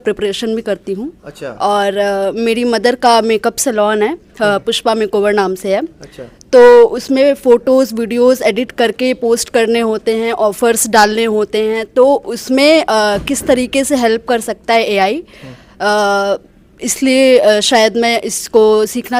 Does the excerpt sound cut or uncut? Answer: uncut